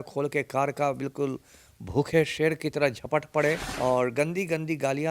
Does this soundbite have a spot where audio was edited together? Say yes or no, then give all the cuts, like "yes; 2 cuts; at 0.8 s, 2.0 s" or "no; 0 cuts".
yes; 1 cut; at 3.7 s